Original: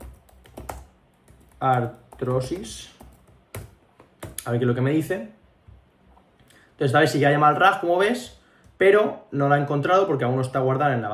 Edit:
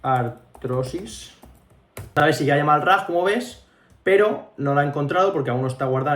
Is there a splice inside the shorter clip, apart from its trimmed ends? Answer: yes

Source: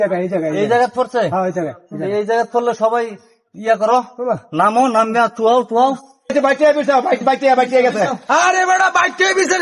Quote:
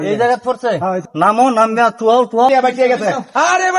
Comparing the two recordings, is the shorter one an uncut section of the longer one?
no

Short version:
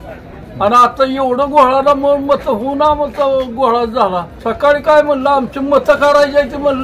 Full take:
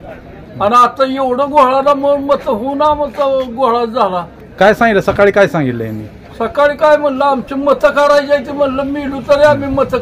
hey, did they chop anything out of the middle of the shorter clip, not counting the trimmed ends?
yes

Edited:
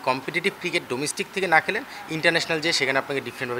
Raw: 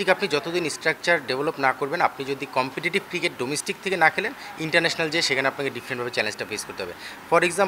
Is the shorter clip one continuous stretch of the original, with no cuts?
yes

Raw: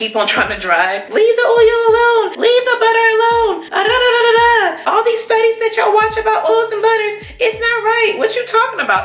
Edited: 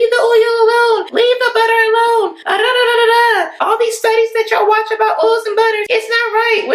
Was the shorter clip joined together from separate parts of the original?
yes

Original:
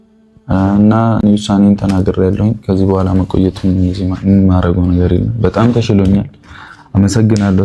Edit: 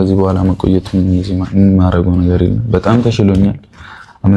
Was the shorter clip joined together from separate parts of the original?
no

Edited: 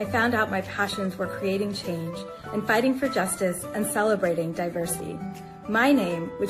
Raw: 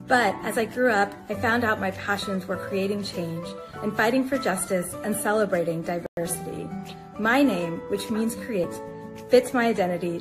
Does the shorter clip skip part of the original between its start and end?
yes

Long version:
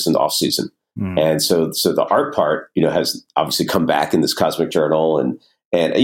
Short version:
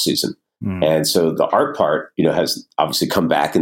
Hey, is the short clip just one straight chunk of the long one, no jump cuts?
no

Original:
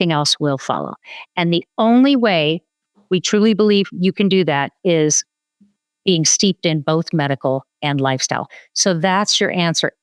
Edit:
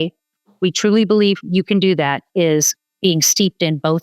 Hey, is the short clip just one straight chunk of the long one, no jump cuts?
no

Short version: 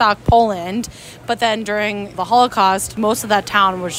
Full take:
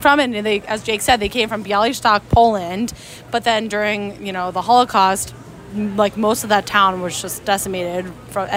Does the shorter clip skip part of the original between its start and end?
yes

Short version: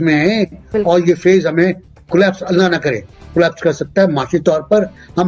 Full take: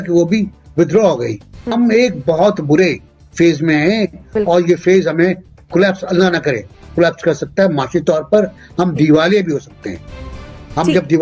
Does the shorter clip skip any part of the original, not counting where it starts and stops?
no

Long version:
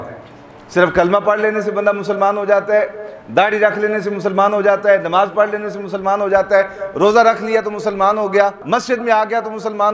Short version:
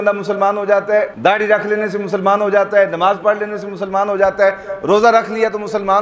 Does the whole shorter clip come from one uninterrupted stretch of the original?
no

